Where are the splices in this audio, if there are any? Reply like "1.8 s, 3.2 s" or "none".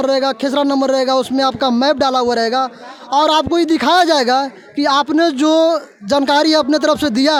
none